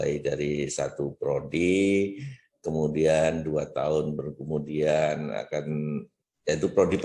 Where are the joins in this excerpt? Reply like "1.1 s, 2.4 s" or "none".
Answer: 1.1 s